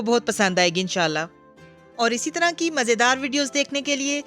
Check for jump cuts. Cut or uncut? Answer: cut